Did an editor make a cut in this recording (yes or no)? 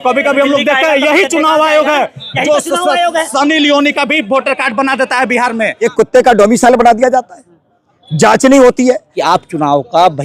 yes